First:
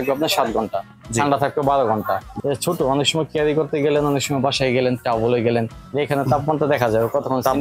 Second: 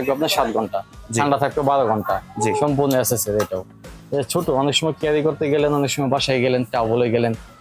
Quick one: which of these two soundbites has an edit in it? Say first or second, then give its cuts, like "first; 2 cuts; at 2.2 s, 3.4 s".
first; 2 cuts; at 2.3 s, 5.8 s